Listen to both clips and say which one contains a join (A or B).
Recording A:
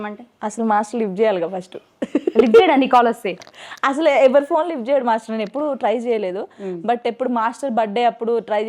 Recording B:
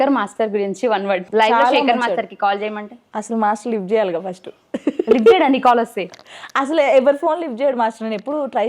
B